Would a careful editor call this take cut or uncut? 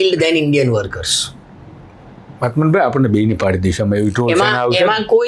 uncut